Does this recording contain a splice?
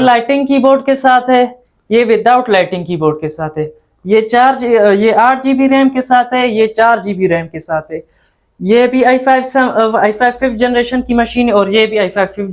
no; 0 cuts

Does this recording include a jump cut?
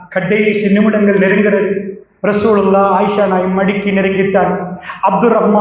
no; 0 cuts

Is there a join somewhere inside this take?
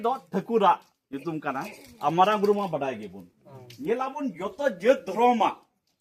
no; 0 cuts

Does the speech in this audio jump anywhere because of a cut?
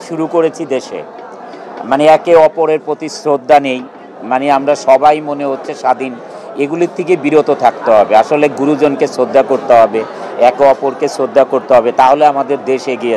no; 0 cuts

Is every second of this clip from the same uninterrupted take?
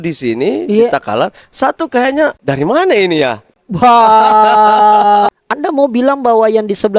no; 2 cuts; at 2.4 s, 5.3 s

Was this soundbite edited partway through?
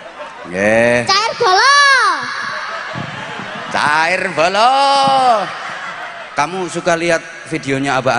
no; 0 cuts

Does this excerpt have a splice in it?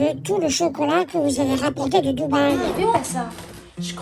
yes; 1 cut; at 2.9 s

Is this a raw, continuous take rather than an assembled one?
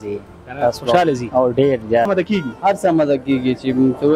no; 1 cut; at 2.1 s

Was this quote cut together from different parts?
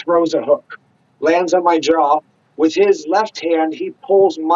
no; 0 cuts

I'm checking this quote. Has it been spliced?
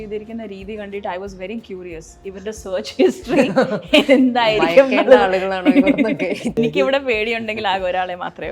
yes; 1 cut; at 6.6 s

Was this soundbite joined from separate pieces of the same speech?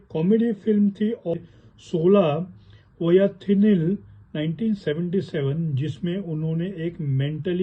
yes; 1 cut; at 1.3 s

